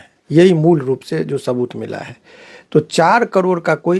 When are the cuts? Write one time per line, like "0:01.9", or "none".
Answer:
none